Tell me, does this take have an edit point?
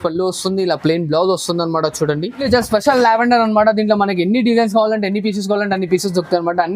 yes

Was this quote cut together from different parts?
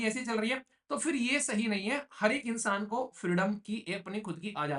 no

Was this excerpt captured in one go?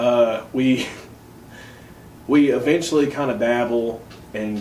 yes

